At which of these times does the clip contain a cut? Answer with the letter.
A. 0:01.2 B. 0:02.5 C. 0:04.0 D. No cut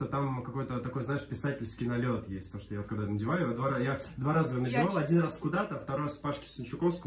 D